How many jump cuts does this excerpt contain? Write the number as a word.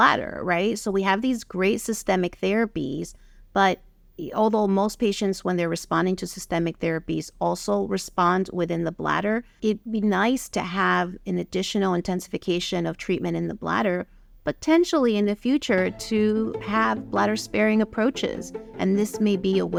zero